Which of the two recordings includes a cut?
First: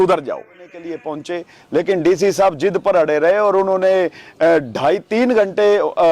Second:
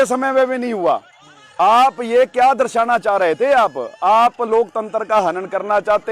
first; 1 cut; at 1.1 s

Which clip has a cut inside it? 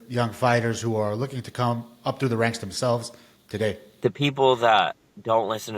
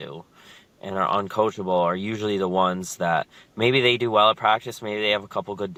first; 1 cut; at 4.0 s

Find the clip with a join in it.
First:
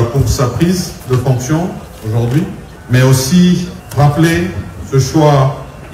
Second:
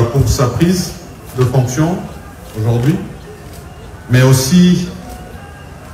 first; 4 cuts; at 1.0 s, 1.9 s, 2.7 s, 3.8 s

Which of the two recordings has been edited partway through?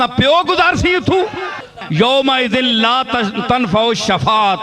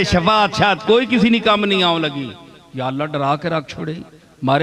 first; 1 cut; at 1.8 s

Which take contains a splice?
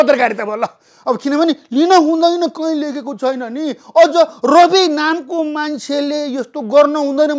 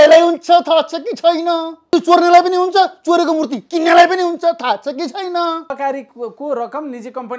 second; 2 cuts; at 1.9 s, 5.7 s

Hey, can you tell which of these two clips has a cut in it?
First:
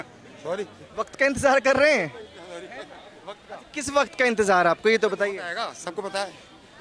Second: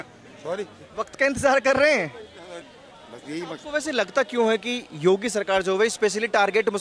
second; 1 cut; at 2.7 s

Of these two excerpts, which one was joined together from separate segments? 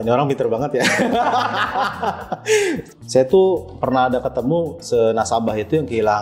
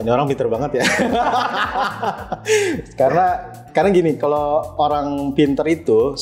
first; 1 cut; at 2.8 s

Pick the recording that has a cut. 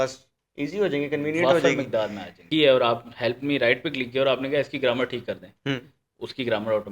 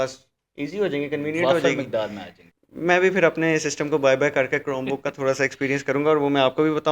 first; 1 cut; at 2.4 s

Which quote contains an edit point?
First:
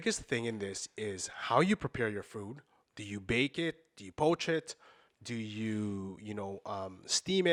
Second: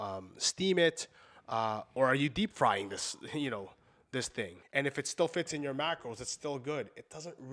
second; 1 cut; at 4.6 s

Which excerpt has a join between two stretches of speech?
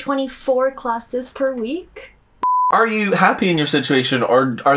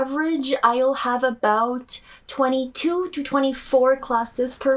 first; 1 cut; at 2.6 s

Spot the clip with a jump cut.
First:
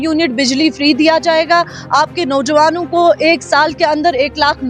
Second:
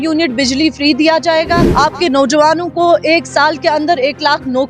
second; 1 cut; at 1.7 s

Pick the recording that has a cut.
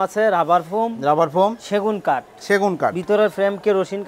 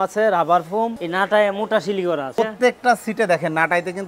second; 2 cuts; at 1.0 s, 2.3 s

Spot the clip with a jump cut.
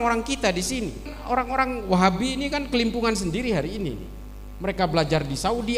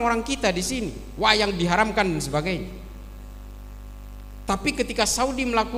first; 1 cut; at 1.1 s

